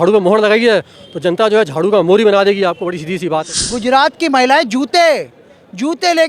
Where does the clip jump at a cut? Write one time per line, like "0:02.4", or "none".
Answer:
0:03.5